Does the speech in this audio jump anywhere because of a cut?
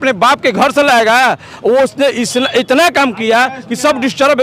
no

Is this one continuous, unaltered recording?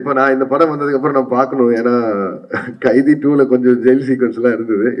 yes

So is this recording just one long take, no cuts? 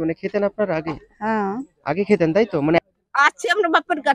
no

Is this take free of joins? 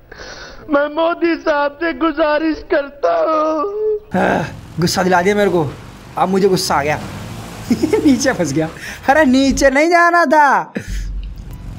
no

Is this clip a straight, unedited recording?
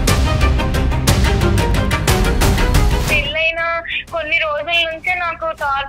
no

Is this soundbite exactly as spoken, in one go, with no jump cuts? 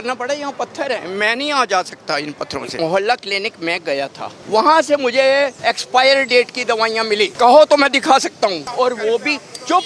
no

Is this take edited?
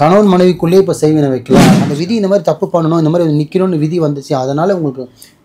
yes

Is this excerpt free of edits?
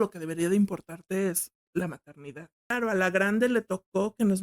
no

